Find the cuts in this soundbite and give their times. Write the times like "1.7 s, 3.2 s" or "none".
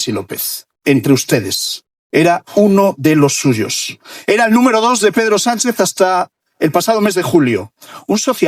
none